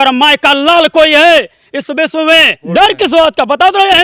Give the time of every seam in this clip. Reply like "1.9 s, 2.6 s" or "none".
2.7 s